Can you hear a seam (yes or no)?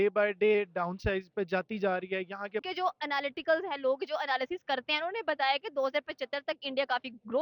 yes